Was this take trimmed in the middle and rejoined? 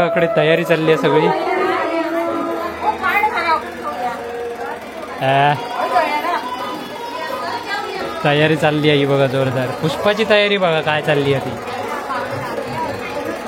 no; 0 cuts

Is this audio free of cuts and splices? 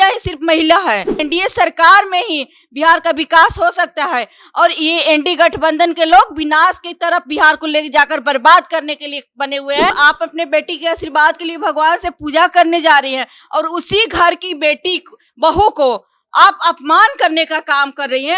no; 2 cuts; at 1.2 s, 9.9 s

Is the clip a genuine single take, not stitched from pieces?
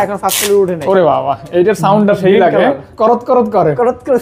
yes; 0 cuts

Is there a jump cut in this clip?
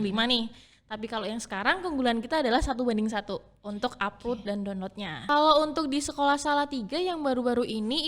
yes; 1 cut; at 5.1 s

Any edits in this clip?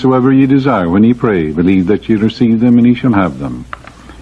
no; 0 cuts

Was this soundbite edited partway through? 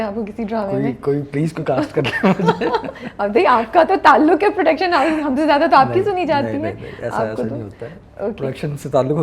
no; 0 cuts

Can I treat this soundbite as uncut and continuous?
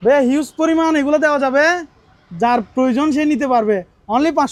yes; 0 cuts

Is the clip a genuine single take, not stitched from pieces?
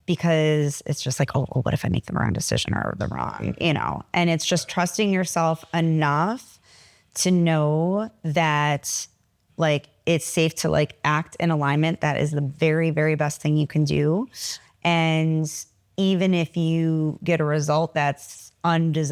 yes; 0 cuts

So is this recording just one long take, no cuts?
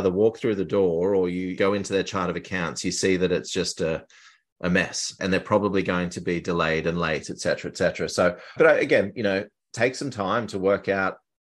yes; 0 cuts

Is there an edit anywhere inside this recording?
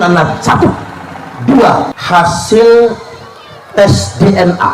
yes; 1 cut; at 2.0 s

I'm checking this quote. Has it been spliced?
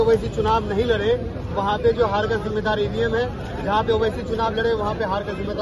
no; 0 cuts

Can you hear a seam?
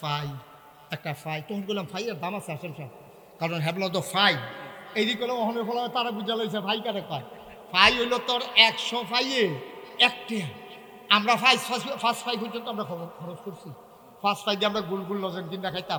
no; 0 cuts

